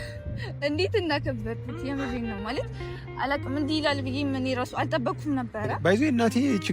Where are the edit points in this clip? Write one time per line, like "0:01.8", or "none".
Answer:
0:05.7